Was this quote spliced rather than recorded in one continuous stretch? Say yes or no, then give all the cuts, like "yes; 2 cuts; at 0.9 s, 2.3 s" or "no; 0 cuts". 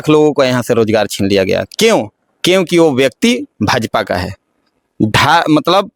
no; 0 cuts